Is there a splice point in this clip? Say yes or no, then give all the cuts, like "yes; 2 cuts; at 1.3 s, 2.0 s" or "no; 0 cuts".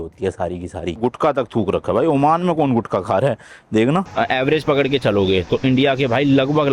yes; 2 cuts; at 1.0 s, 4.1 s